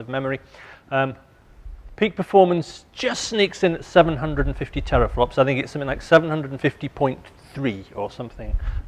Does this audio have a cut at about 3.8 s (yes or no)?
no